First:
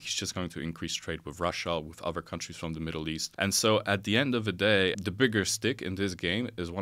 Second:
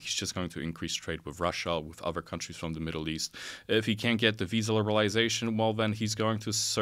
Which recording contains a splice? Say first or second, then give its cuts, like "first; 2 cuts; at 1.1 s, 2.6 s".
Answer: first; 2 cuts; at 3.3 s, 5.0 s